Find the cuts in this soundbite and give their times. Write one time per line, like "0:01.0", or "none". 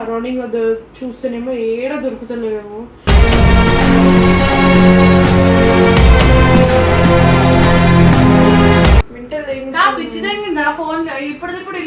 0:09.2